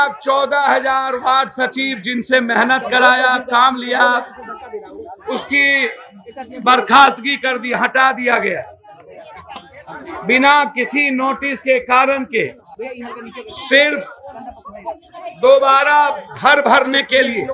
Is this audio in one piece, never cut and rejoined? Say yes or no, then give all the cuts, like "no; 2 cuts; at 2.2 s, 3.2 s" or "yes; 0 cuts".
yes; 0 cuts